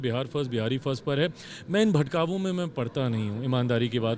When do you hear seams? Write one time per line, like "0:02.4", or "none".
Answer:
none